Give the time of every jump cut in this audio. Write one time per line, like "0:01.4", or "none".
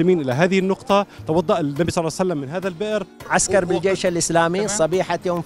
0:03.2